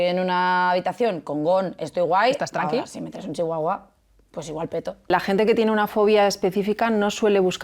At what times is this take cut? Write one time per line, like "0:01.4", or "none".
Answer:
0:04.9

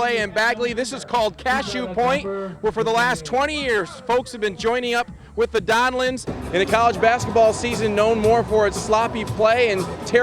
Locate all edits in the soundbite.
0:06.3

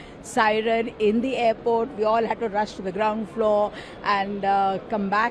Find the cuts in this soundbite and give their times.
none

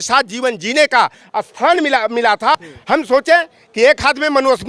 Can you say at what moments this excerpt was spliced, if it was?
0:02.7

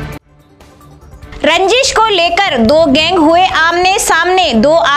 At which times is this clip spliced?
0:01.1

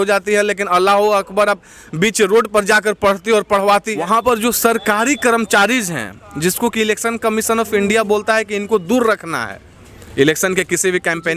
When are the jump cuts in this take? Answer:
0:04.1

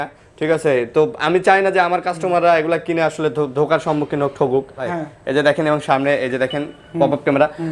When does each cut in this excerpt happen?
0:04.8

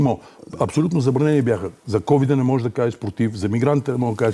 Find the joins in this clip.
none

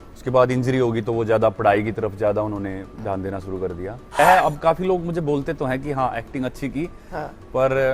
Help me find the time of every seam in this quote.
0:04.2

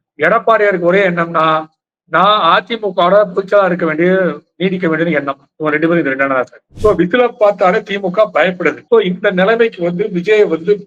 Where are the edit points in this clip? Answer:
0:06.6
0:08.8

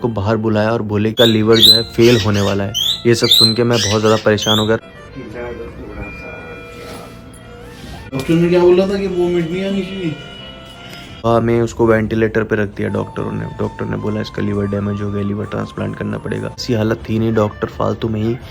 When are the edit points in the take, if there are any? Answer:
0:01.1
0:04.9
0:08.1
0:11.2
0:16.6

